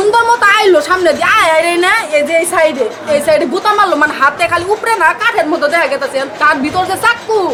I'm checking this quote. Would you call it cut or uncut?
uncut